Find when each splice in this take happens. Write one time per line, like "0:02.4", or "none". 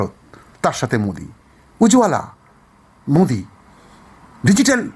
none